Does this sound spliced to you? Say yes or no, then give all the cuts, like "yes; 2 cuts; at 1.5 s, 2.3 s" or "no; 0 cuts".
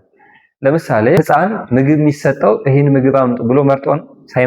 yes; 1 cut; at 1.2 s